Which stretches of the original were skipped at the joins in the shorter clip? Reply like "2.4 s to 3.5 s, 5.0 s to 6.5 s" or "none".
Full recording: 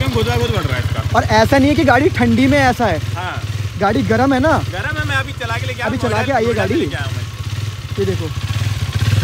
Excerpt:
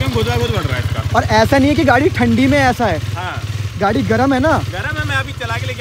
none